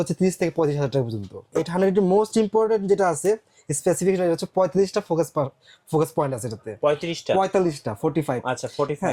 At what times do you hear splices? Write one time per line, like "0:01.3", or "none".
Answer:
0:01.4